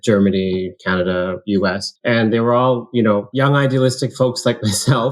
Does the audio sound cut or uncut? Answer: cut